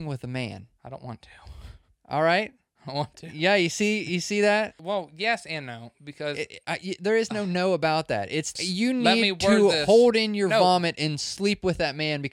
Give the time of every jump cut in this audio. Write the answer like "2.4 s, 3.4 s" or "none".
4.8 s, 8.6 s